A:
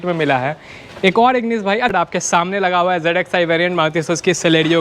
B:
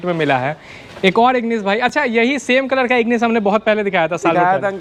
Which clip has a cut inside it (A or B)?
A